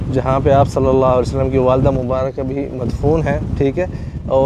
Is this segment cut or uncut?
uncut